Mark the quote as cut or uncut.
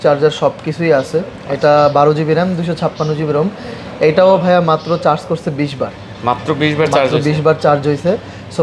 uncut